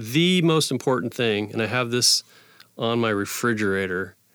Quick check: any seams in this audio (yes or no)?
no